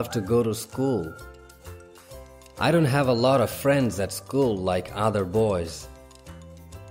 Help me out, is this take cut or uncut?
cut